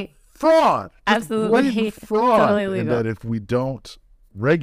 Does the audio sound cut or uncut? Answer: cut